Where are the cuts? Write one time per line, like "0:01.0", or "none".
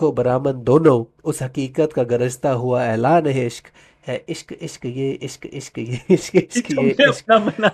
none